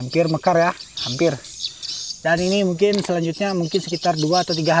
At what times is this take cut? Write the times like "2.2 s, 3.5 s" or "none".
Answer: none